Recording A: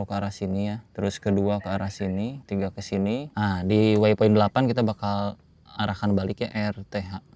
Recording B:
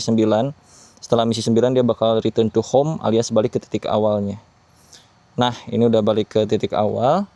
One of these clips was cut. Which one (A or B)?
A